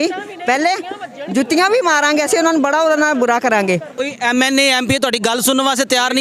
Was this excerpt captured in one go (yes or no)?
no